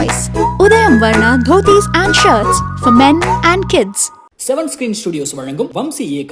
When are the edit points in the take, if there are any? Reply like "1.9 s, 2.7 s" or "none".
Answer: none